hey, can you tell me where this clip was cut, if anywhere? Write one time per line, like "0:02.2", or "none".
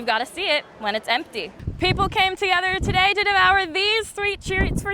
0:01.5